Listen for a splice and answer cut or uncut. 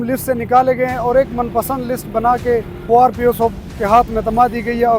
cut